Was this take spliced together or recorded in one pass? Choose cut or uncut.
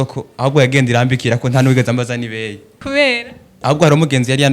cut